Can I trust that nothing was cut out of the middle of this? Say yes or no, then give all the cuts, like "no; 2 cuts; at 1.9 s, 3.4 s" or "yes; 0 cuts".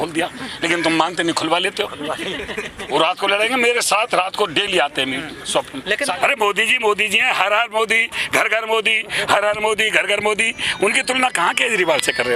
no; 1 cut; at 6.0 s